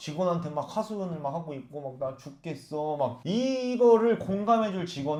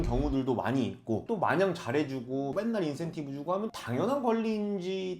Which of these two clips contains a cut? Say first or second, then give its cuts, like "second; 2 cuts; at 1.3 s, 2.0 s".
second; 2 cuts; at 2.5 s, 3.7 s